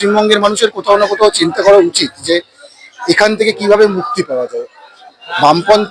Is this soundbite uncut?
yes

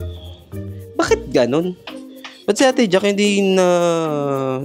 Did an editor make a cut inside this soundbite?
no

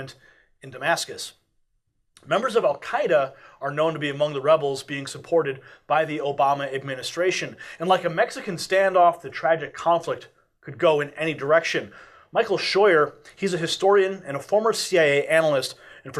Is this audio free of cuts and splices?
yes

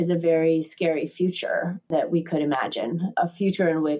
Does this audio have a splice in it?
yes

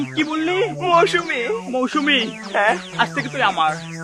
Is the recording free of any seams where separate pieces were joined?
yes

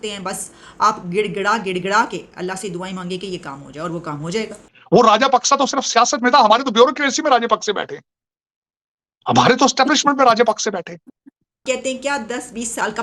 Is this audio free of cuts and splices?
no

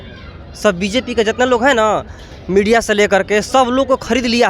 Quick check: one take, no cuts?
yes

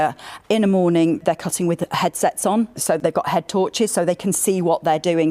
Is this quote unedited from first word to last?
yes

